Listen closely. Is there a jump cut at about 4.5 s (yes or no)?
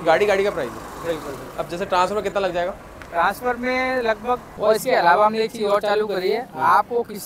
yes